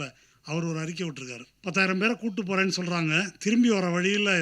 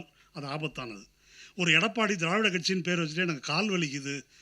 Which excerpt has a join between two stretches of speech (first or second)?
first